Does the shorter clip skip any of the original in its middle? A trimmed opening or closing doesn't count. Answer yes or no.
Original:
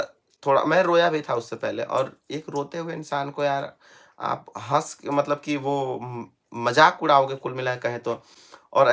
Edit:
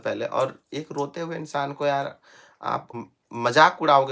yes